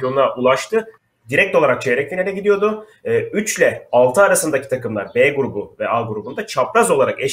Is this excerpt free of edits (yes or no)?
no